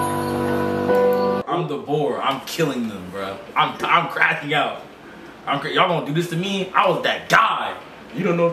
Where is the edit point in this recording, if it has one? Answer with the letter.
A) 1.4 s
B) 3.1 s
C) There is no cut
A